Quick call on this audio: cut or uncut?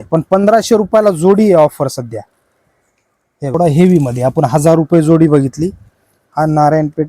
cut